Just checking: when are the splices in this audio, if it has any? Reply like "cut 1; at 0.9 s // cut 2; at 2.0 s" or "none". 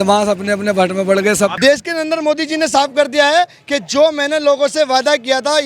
cut 1; at 1.5 s